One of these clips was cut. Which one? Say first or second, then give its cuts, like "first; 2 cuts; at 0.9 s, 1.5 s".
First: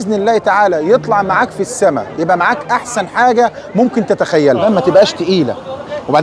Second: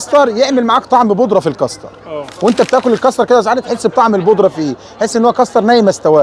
first; 1 cut; at 4.6 s